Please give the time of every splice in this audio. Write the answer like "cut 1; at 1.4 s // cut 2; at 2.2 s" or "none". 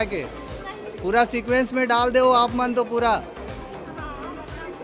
none